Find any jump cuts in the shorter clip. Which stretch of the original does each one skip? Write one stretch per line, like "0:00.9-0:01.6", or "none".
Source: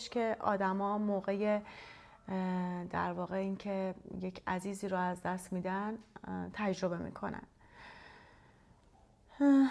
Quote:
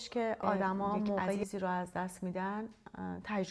0:01.4-0:04.7